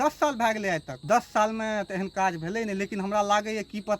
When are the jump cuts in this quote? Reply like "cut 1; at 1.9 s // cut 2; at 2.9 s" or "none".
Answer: cut 1; at 0.9 s